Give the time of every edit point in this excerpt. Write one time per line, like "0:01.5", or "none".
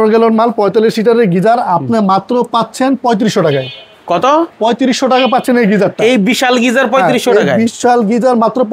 none